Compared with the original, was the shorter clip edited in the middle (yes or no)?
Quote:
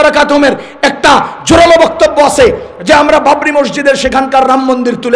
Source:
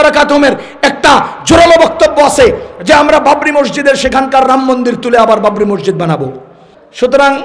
no